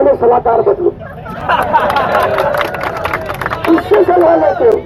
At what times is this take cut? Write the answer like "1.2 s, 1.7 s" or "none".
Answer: none